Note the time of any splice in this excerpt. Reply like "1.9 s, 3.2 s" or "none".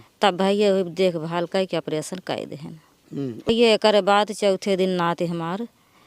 3.5 s